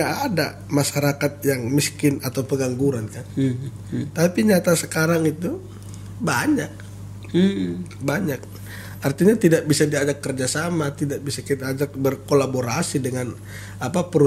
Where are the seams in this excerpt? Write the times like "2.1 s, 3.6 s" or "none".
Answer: none